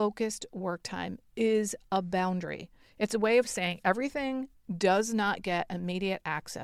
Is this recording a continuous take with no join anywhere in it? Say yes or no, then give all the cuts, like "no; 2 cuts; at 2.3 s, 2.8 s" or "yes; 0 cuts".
yes; 0 cuts